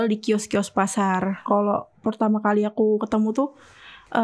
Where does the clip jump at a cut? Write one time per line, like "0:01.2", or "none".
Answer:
0:01.4